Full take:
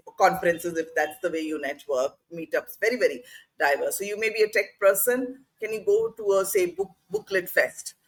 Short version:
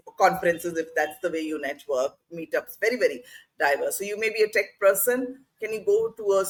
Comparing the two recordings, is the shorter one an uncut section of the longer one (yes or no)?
yes